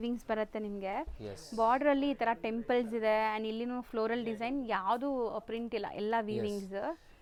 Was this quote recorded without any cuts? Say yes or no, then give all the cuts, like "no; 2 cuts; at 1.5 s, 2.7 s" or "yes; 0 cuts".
yes; 0 cuts